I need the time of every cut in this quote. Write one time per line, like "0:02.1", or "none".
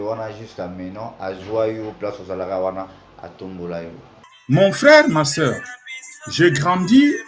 0:04.1